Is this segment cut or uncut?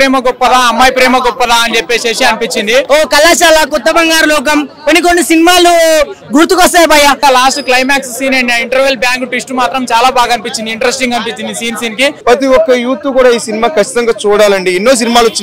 cut